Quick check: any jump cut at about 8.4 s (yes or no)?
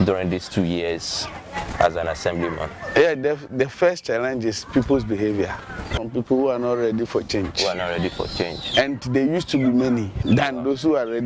no